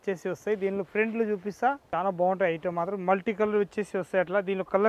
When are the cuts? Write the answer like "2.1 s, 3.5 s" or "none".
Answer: 1.8 s